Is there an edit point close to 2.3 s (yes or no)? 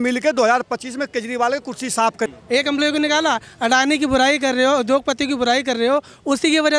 yes